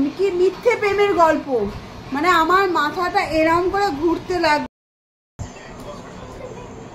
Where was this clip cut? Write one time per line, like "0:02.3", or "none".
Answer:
0:04.6